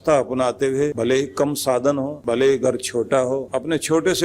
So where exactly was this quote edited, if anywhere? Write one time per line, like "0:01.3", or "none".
0:00.9
0:02.2
0:03.5

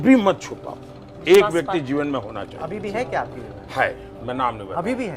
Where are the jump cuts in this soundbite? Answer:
none

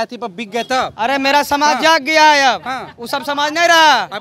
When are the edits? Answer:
none

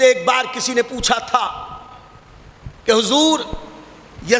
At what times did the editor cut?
none

